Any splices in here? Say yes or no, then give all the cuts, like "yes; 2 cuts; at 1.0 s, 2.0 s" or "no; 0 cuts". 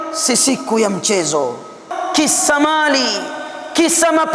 yes; 1 cut; at 2.0 s